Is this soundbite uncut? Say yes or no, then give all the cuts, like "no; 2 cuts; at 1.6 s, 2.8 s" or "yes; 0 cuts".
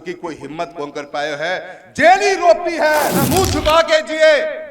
no; 1 cut; at 3.2 s